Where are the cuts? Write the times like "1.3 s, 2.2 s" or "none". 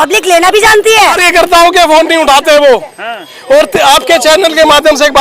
1.2 s